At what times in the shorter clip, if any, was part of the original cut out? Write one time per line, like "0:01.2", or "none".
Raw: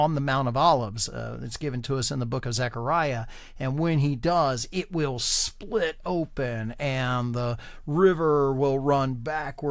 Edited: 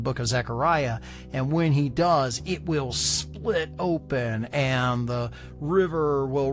none